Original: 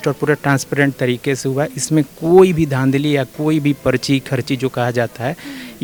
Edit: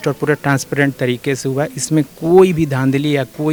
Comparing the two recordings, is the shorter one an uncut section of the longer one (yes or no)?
yes